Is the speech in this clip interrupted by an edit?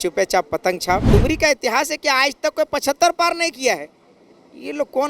yes; 1 cut; at 1.1 s

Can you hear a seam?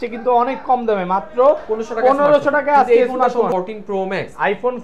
yes; 1 cut; at 3.7 s

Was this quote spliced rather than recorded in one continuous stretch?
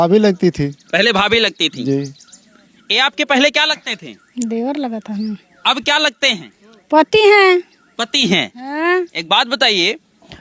no; 0 cuts

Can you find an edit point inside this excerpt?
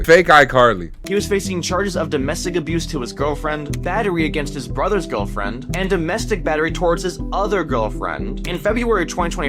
yes; 1 cut; at 1.0 s

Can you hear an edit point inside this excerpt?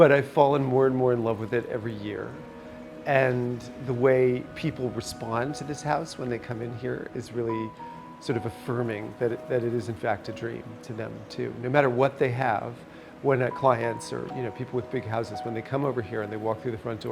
no; 0 cuts

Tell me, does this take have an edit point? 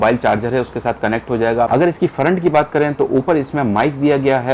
yes; 1 cut; at 1.7 s

